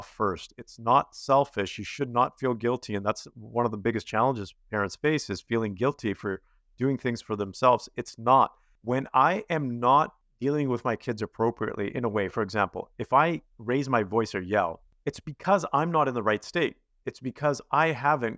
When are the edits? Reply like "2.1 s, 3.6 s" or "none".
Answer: 8.7 s, 10.2 s, 14.9 s